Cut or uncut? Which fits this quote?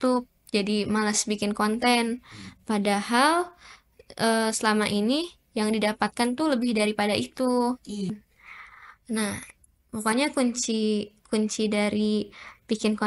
cut